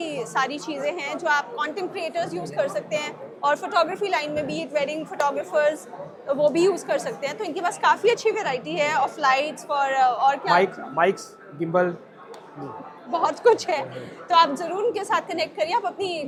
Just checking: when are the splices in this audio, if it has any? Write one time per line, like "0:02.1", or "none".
none

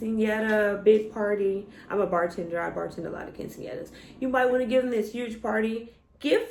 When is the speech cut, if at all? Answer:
none

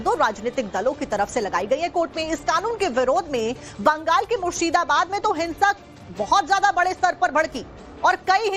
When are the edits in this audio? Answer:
none

